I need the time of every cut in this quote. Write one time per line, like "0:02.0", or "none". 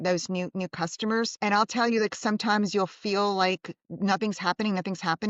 none